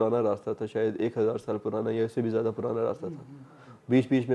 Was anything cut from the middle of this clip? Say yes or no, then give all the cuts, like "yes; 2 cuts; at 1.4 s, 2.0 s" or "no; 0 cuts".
no; 0 cuts